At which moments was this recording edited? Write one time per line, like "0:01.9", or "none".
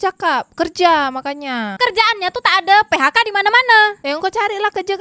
0:01.8